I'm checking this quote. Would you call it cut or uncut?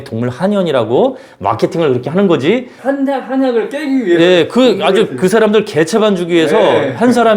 cut